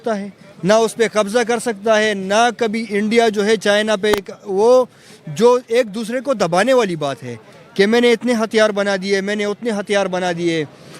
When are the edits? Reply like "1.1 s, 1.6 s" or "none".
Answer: none